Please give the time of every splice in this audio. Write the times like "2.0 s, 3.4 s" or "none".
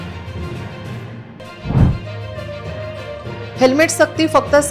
1.2 s